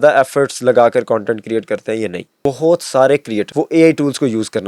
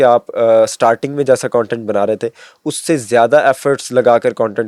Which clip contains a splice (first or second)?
first